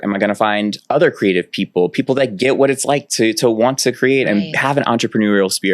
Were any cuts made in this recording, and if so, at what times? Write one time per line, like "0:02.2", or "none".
none